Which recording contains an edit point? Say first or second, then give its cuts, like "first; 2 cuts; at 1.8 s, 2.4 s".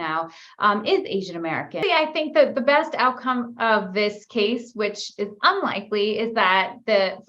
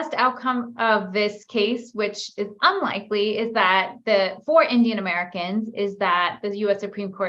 first; 1 cut; at 1.7 s